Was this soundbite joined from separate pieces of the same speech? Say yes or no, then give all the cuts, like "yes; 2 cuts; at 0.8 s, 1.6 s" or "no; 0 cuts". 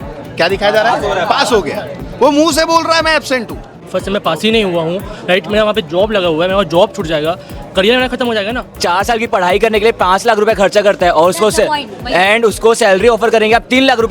yes; 2 cuts; at 3.8 s, 8.8 s